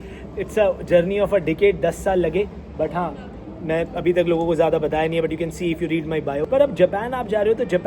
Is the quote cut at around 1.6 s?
no; 1 cut; at 6.5 s

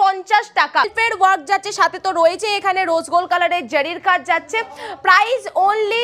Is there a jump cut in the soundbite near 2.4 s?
no; 1 cut; at 0.9 s

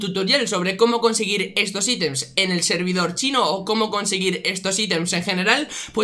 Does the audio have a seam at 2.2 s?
no; 0 cuts

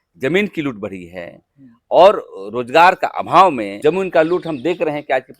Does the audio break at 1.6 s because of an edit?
no; 1 cut; at 3.7 s

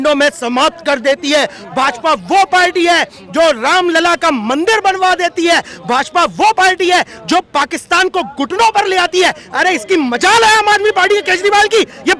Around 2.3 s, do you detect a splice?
no; 0 cuts

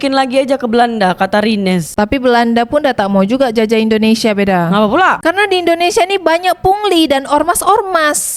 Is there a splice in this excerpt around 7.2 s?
no; 0 cuts

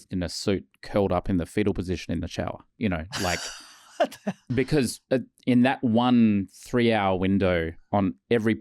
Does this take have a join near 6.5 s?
no; 3 cuts; at 2.6 s, 4.4 s, 7.8 s

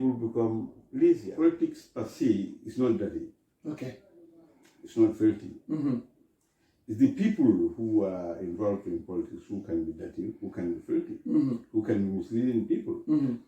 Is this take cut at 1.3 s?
yes; 1 cut; at 1.3 s

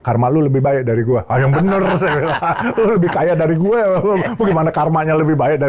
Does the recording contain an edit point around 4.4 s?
no; 0 cuts

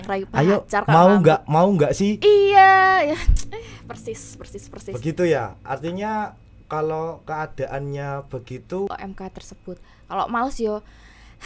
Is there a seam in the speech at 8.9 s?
yes; 1 cut; at 8.9 s

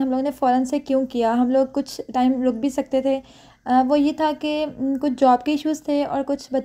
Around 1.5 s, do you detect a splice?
no; 0 cuts

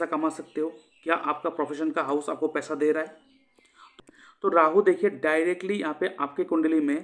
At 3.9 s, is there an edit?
yes; 1 cut; at 3.9 s

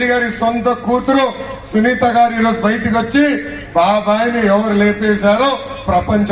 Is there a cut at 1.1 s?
no; 0 cuts

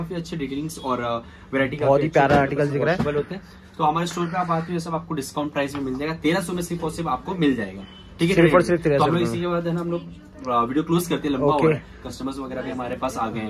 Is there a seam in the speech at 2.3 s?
no; 0 cuts

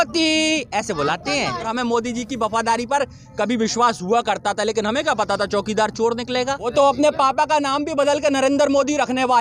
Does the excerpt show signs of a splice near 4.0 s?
no; 2 cuts; at 1.7 s, 6.7 s

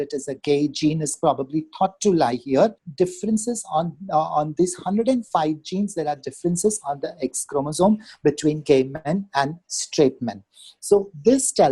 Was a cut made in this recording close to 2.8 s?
yes; 1 cut; at 2.8 s

